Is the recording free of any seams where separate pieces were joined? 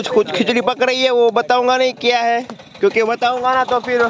yes; 0 cuts

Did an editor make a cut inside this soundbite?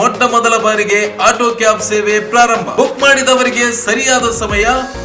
no; 0 cuts

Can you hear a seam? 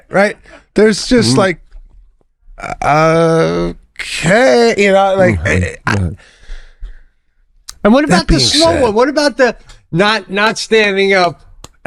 no; 0 cuts

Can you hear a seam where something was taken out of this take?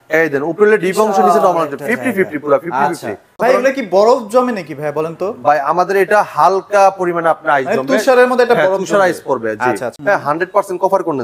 yes; 2 cuts; at 3.4 s, 9.9 s

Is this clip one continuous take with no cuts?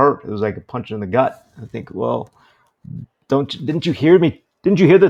yes; 0 cuts

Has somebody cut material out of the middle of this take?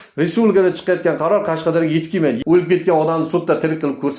yes; 1 cut; at 2.4 s

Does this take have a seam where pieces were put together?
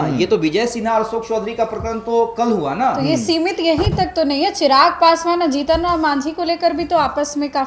no; 0 cuts

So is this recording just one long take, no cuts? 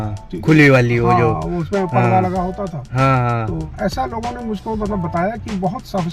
no; 1 cut; at 3.7 s

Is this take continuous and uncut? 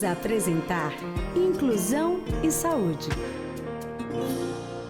no; 1 cut; at 3.4 s

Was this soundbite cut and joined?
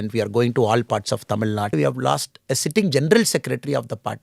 yes; 1 cut; at 1.7 s

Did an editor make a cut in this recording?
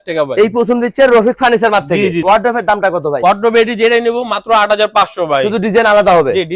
no; 0 cuts

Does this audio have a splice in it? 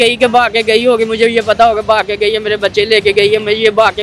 no; 0 cuts

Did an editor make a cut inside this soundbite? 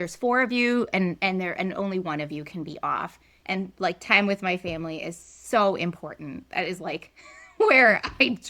yes; 1 cut; at 3.3 s

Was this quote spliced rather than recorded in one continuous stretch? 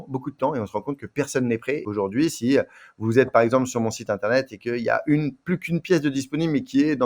yes; 1 cut; at 1.8 s

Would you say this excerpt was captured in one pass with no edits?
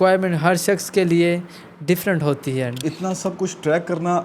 no; 1 cut; at 2.7 s

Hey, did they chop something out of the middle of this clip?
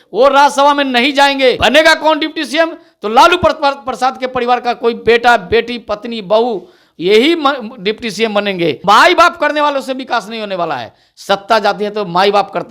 yes; 2 cuts; at 1.6 s, 8.8 s

